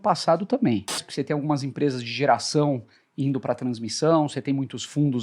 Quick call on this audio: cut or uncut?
cut